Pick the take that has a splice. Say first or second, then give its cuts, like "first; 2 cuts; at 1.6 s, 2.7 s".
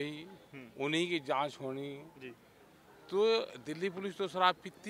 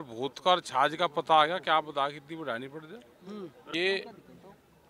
second; 1 cut; at 3.6 s